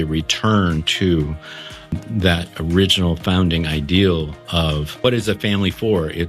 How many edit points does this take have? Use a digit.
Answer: 2